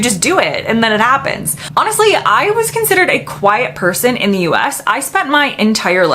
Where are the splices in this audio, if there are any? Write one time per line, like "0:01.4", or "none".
0:01.6